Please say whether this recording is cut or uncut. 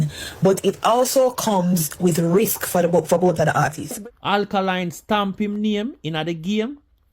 cut